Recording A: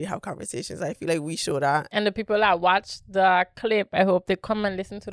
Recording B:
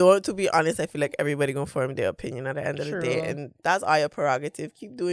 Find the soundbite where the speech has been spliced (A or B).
A